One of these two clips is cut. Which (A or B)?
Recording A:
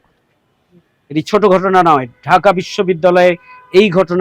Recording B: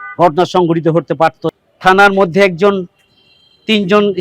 B